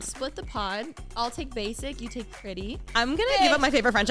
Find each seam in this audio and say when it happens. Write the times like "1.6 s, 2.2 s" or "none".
1.0 s, 2.8 s

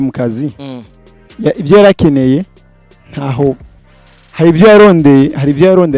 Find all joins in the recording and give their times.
none

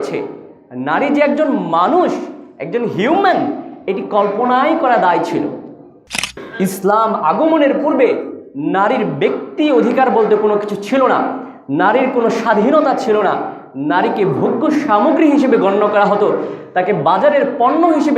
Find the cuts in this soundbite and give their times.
6.2 s

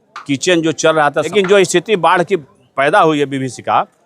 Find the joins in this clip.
1.3 s

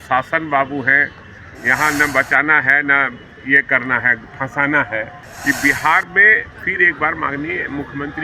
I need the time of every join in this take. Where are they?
5.2 s

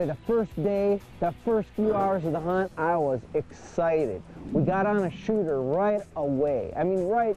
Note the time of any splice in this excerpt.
4.3 s

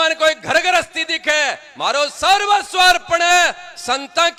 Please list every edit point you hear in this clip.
none

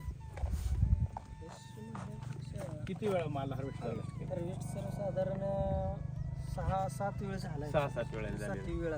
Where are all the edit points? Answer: 1.6 s

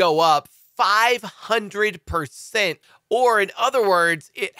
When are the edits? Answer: 2.8 s

